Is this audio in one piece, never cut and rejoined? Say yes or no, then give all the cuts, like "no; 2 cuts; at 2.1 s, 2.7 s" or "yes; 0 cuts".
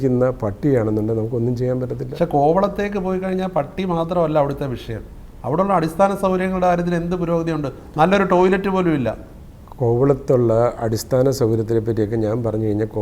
yes; 0 cuts